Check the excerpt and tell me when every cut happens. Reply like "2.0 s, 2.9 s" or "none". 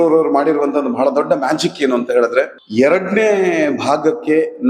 2.6 s